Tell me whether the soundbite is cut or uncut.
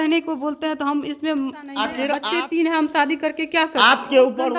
cut